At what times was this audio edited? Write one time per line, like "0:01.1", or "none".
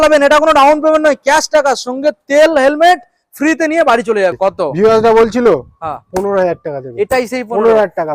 0:04.4